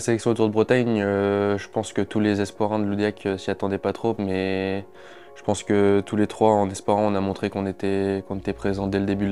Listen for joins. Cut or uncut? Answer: uncut